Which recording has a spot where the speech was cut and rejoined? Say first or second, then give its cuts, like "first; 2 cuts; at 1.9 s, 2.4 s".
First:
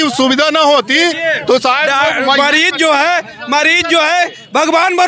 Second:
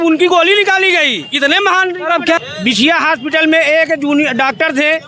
second; 1 cut; at 2.4 s